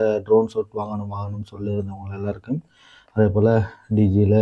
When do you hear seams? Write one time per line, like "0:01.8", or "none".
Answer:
none